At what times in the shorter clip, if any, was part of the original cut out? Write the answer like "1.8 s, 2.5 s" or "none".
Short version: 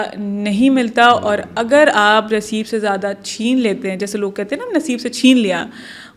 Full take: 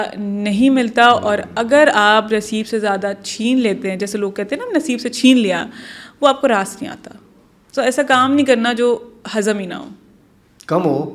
none